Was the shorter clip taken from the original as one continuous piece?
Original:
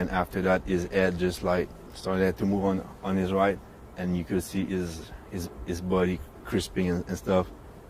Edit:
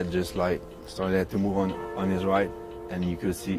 yes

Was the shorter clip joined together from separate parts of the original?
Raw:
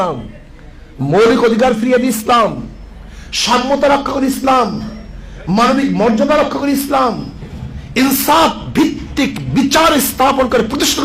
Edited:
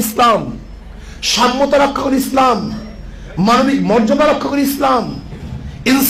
no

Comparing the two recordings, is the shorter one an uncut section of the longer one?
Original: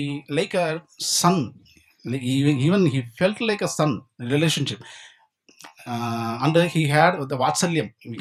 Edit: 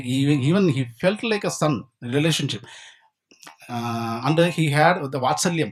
yes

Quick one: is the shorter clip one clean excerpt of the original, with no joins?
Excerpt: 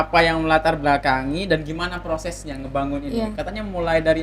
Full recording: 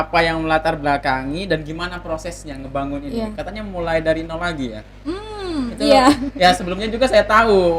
yes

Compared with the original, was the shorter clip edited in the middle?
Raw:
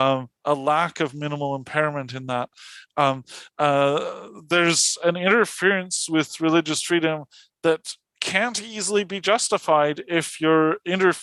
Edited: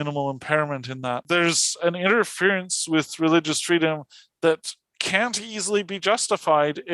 yes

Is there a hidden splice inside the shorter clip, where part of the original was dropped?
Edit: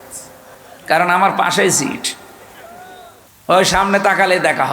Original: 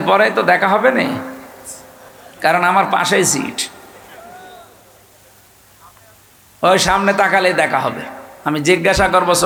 yes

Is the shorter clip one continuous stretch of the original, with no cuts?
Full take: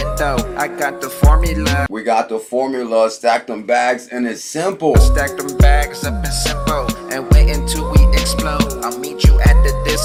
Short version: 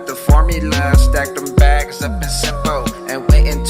no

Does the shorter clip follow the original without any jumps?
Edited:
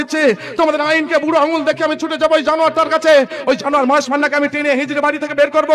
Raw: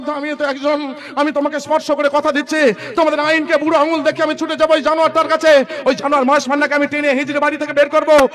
yes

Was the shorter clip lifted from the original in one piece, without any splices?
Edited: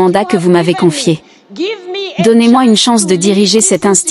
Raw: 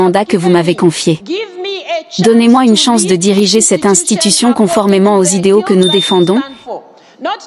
yes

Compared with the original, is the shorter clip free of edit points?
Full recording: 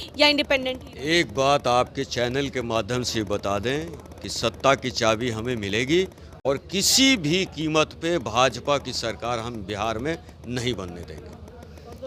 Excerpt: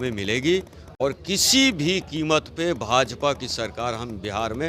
yes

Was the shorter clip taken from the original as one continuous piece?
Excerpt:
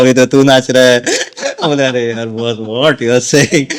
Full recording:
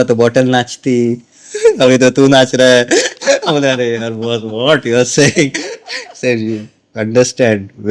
yes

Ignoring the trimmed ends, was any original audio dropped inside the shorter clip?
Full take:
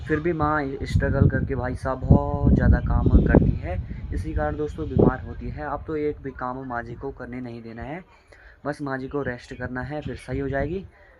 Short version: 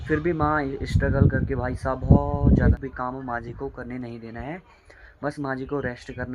yes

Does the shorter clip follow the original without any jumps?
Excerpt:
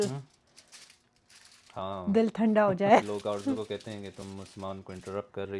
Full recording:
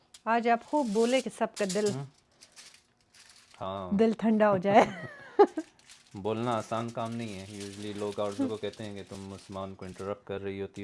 no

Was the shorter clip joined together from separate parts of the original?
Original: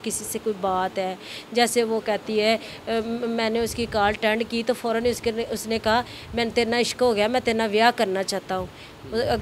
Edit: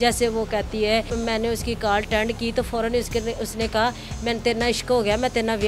yes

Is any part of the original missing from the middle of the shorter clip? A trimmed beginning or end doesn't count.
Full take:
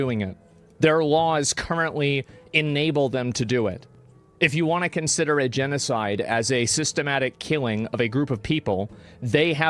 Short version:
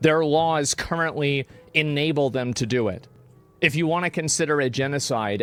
no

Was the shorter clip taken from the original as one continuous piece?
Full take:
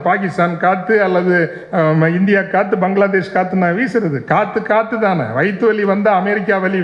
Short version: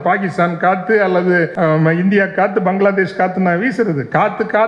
no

